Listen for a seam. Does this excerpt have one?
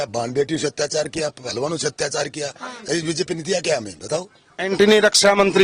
yes; 1 cut; at 4.7 s

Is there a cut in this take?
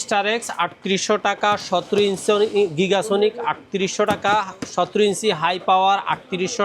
no; 0 cuts

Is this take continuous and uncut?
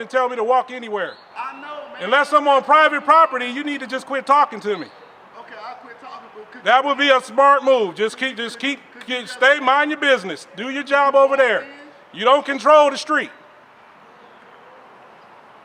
yes; 0 cuts

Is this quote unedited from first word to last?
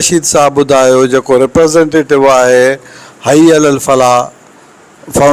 yes; 0 cuts

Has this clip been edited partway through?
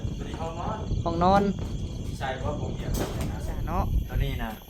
yes; 1 cut; at 3.5 s

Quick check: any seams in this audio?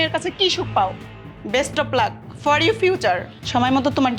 no; 0 cuts

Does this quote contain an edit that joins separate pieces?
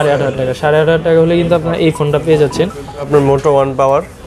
no; 0 cuts

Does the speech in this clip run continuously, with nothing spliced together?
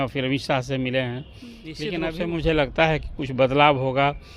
no; 1 cut; at 2.0 s

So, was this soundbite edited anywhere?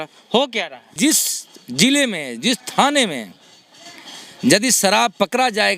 yes; 1 cut; at 1.0 s

